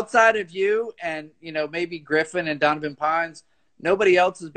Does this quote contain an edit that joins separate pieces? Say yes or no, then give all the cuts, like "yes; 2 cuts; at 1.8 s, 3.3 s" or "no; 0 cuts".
no; 0 cuts